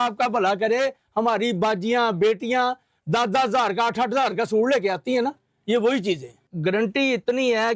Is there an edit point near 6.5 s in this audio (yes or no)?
yes